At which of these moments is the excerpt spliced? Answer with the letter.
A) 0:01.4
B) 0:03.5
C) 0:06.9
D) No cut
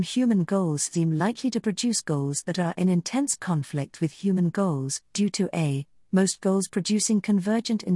D